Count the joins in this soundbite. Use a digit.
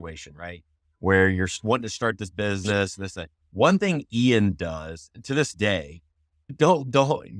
1